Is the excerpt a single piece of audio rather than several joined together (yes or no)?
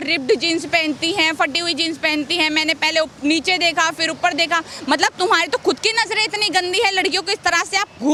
yes